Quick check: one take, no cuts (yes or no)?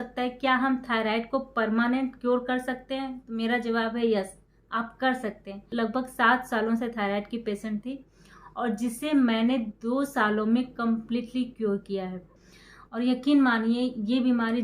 no